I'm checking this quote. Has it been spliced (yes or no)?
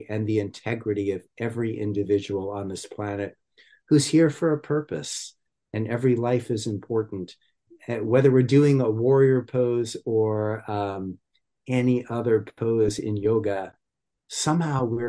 yes